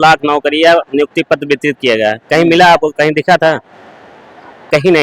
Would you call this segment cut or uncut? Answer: uncut